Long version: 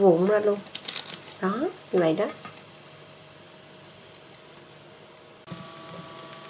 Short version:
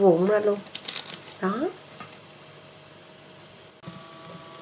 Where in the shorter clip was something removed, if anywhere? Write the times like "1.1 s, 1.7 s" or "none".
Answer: 1.9 s, 3.7 s